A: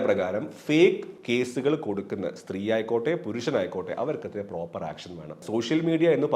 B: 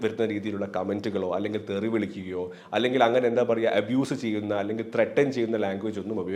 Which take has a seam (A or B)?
A